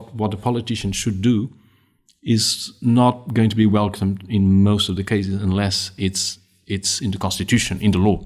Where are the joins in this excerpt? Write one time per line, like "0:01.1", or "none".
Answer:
none